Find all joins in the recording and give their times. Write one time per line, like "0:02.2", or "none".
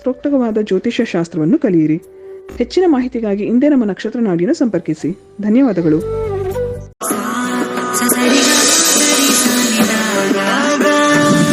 0:06.9

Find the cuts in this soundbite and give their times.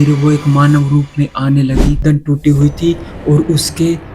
0:02.0

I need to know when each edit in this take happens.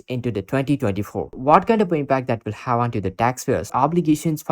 0:01.4
0:03.7

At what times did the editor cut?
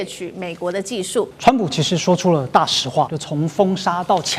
0:01.3
0:03.2

